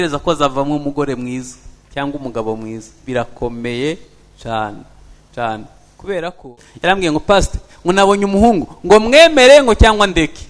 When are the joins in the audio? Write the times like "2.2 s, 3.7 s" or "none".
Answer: 6.4 s